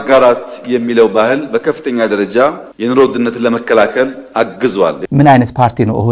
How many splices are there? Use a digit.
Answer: 1